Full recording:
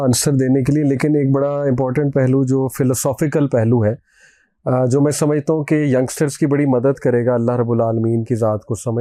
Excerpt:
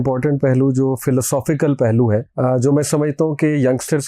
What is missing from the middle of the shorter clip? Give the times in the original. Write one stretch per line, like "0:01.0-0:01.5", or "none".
0:04.0-0:04.6